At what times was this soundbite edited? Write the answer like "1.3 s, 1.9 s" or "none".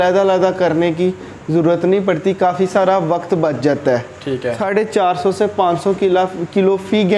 4.6 s